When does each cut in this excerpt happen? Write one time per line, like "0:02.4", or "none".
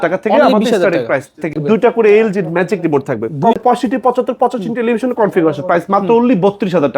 0:01.6
0:03.6